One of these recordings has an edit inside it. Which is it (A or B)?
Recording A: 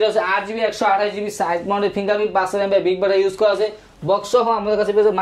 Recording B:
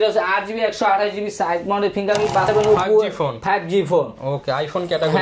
B